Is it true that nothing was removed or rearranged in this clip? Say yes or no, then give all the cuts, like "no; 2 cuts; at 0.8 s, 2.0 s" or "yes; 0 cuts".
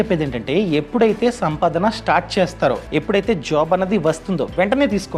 no; 1 cut; at 2.8 s